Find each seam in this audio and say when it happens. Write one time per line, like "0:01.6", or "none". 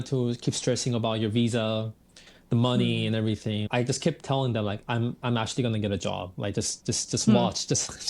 0:03.6